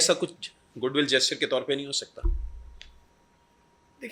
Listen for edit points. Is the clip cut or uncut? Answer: uncut